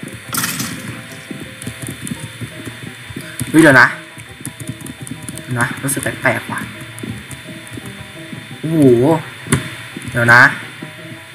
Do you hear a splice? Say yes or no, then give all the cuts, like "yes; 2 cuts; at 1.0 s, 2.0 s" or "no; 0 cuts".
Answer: no; 0 cuts